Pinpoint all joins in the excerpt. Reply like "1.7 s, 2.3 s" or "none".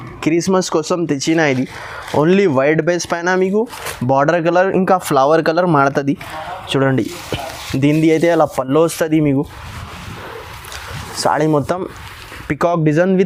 none

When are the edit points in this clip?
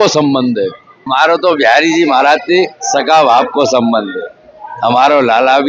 1.0 s

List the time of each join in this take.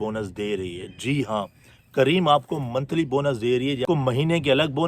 3.8 s

